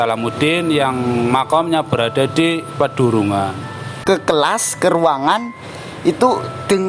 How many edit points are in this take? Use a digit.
1